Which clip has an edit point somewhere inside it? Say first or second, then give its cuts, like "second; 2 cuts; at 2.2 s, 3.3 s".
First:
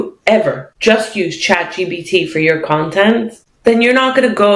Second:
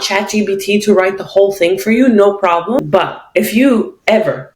second; 1 cut; at 2.8 s